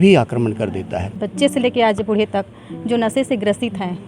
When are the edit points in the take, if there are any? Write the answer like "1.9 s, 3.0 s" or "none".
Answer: 1.2 s